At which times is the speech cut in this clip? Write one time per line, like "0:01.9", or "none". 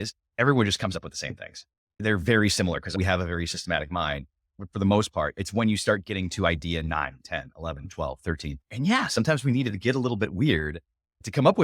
0:04.6